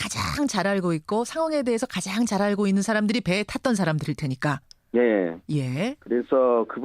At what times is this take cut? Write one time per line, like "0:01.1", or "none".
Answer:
0:04.3

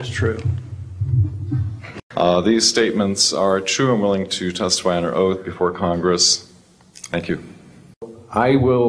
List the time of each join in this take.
0:01.9
0:08.1

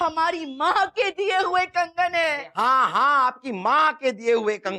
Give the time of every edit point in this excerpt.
none

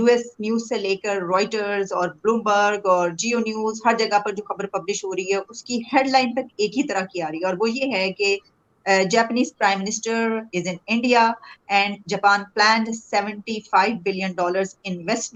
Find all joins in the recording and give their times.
none

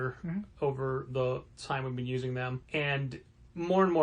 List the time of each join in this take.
0:01.5
0:02.6

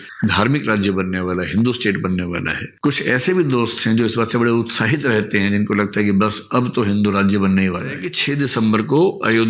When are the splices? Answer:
0:08.1

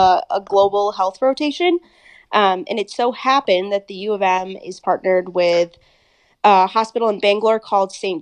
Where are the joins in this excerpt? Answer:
none

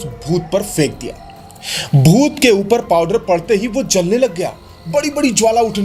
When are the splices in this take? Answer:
none

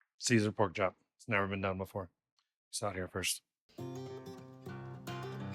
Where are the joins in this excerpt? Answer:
0:03.8

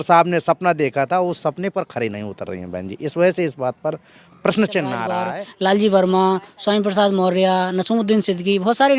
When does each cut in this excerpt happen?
0:05.2

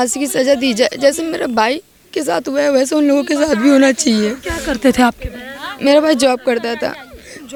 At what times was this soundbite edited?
none

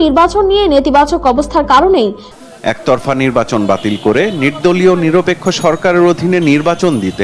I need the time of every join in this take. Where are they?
0:02.3

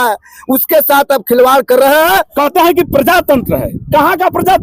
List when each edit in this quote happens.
0:02.3

